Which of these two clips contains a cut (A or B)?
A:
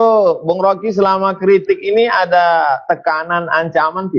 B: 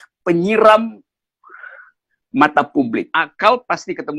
B